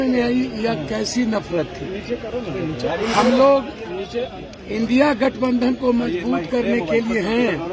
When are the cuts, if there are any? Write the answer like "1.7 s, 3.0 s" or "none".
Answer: none